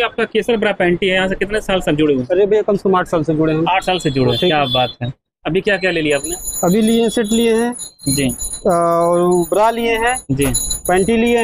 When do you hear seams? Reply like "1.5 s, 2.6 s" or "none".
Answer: none